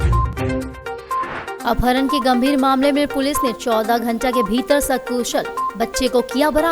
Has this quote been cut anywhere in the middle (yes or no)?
yes